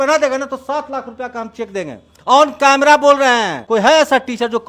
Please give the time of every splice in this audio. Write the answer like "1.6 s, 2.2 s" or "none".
3.6 s